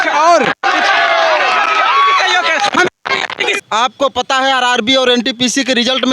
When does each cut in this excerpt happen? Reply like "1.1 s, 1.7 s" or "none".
3.6 s